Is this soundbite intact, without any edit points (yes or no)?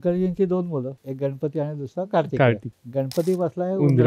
no